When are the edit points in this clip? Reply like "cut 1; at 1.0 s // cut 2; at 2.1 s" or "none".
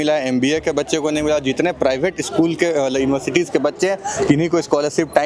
none